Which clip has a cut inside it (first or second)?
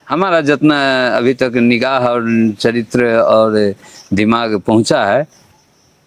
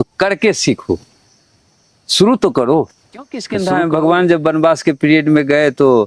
second